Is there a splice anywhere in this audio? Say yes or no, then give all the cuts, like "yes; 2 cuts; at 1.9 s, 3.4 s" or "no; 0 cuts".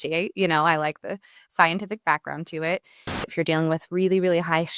yes; 1 cut; at 3.2 s